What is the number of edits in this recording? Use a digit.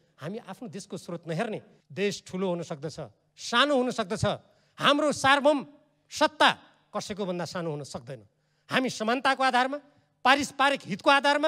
1